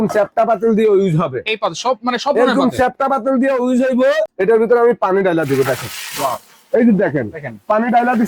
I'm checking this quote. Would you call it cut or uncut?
cut